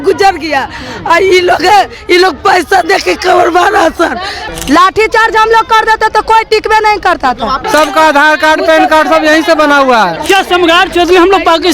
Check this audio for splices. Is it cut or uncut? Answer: cut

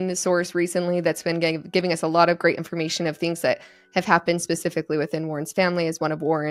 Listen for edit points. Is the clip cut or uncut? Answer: uncut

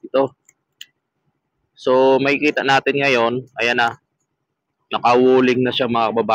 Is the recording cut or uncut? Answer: uncut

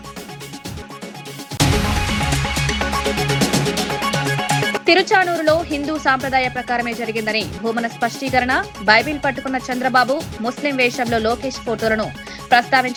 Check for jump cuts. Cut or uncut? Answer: uncut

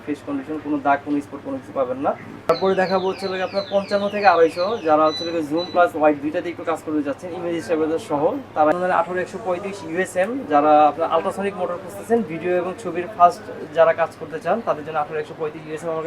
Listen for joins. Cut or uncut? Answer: cut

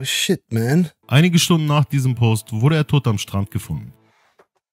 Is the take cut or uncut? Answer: cut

